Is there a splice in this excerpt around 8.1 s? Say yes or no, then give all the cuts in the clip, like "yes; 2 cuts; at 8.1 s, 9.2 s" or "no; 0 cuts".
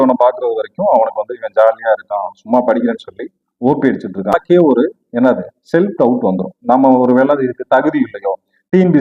no; 1 cut; at 4.3 s